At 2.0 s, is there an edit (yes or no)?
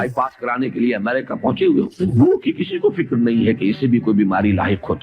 yes